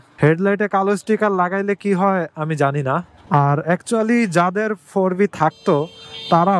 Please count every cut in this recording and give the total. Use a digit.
1